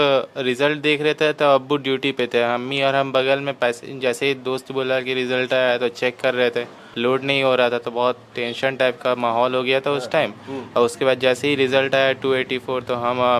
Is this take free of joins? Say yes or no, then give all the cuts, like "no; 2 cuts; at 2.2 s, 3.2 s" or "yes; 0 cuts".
no; 1 cut; at 6.8 s